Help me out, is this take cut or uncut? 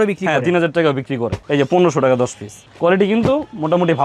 cut